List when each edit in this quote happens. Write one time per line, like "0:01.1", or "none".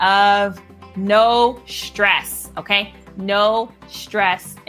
none